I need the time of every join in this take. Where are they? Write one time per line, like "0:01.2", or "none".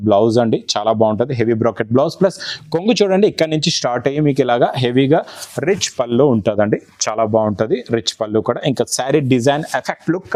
none

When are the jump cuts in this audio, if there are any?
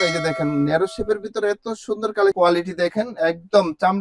0:02.4

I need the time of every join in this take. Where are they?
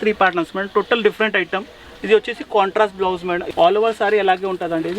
0:03.4

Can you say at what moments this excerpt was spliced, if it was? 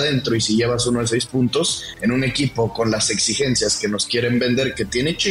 none

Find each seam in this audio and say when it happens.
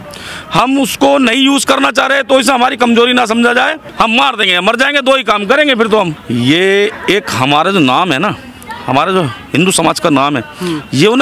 0:03.8
0:06.2

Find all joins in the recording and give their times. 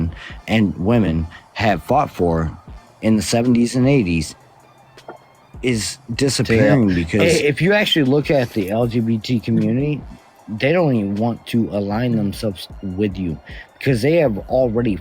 0:07.2

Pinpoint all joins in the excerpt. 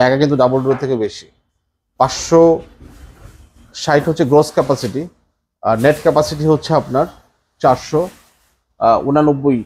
none

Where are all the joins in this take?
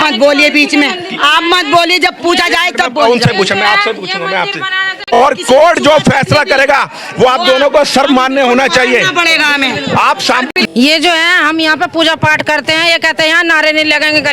0:05.0
0:10.6

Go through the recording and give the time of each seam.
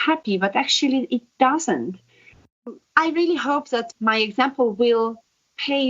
0:02.6
0:03.9

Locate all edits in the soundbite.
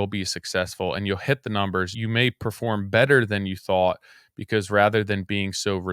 0:01.9

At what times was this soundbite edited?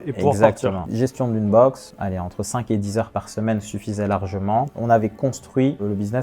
0:00.8
0:01.9
0:04.7

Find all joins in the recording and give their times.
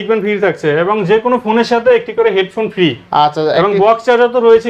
none

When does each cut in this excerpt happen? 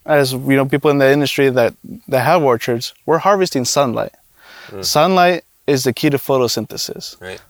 none

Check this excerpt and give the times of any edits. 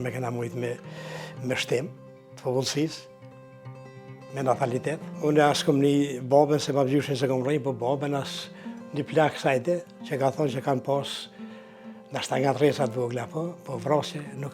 0:05.1

